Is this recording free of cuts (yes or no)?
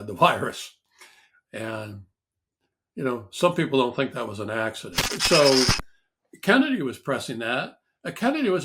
no